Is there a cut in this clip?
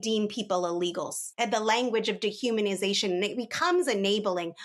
yes; 1 cut; at 1.3 s

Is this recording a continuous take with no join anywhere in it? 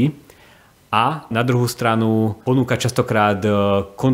no; 1 cut; at 1.3 s

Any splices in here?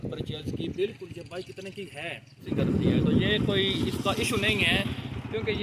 yes; 1 cut; at 2.5 s

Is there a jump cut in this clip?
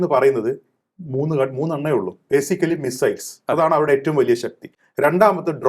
no; 0 cuts

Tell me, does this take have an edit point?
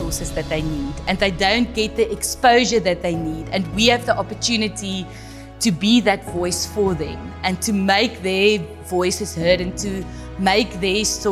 no; 0 cuts

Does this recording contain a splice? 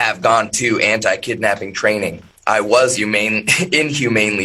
yes; 1 cut; at 2.3 s

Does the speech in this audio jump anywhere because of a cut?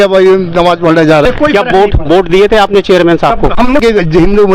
yes; 2 cuts; at 1.2 s, 3.8 s

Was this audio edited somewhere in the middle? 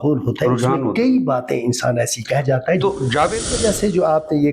yes; 1 cut; at 3.4 s

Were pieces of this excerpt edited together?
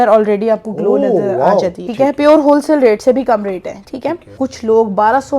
yes; 2 cuts; at 1.8 s, 4.3 s

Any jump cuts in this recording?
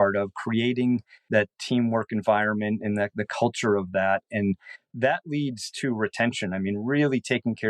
yes; 1 cut; at 1.3 s

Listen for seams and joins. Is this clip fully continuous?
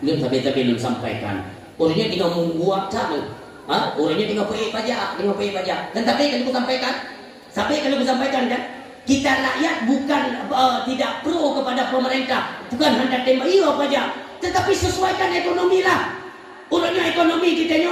yes; 0 cuts

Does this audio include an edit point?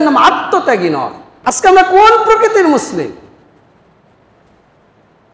yes; 1 cut; at 1.2 s

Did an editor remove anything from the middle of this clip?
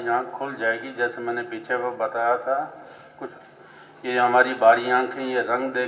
yes; 1 cut; at 3.3 s

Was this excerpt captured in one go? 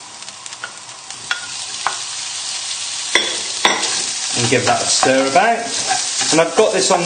yes; 0 cuts

